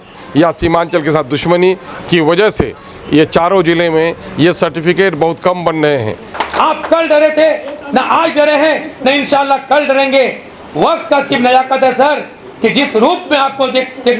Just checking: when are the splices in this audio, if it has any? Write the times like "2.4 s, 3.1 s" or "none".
6.4 s